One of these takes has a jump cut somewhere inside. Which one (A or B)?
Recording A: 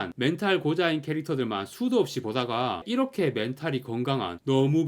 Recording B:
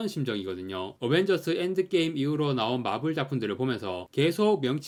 A